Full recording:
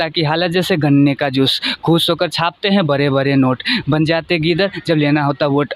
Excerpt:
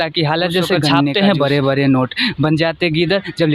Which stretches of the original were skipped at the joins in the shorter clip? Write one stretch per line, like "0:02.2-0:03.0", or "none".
0:01.1-0:02.6